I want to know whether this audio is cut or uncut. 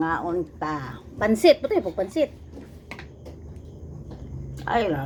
uncut